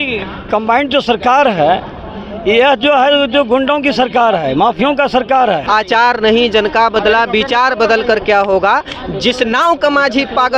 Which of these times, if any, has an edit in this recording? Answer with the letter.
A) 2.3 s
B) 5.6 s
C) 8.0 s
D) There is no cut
B